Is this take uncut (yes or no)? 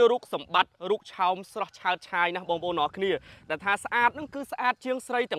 yes